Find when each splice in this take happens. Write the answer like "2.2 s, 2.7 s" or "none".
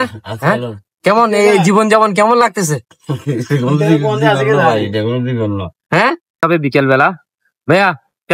6.4 s